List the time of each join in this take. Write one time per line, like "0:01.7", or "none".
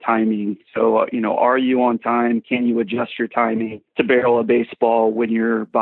0:03.8